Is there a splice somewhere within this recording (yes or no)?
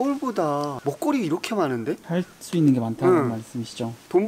no